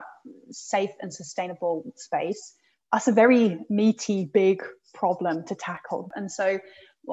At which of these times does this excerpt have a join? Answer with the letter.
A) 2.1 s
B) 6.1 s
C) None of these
B